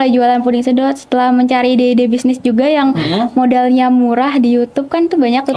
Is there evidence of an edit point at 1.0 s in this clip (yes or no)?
no